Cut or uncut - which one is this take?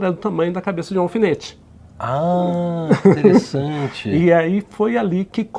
uncut